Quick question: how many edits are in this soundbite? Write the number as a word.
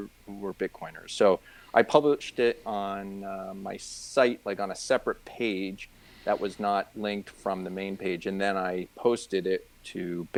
zero